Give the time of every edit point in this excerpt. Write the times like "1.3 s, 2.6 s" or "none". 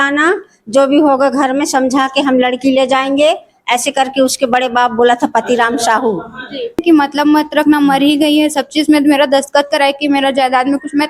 6.8 s